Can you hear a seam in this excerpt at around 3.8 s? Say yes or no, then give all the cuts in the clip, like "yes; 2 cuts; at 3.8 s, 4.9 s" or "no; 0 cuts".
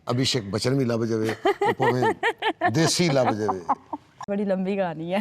yes; 1 cut; at 3.8 s